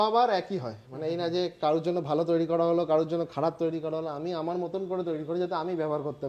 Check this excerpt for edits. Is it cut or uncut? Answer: uncut